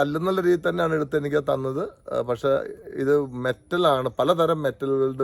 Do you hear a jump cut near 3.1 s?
no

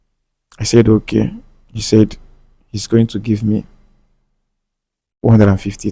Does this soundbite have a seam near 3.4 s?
no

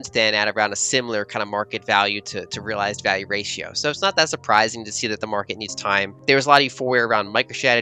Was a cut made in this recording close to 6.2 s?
yes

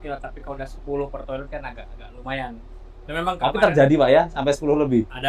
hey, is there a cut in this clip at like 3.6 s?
no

